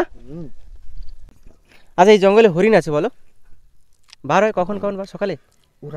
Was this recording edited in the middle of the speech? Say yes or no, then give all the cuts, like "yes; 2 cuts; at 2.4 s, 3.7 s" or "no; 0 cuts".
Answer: yes; 1 cut; at 1.3 s